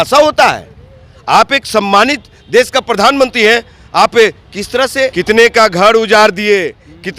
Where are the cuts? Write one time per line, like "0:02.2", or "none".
0:05.2